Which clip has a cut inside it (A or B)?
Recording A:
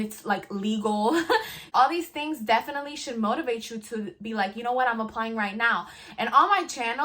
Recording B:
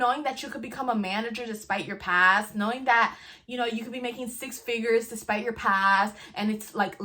A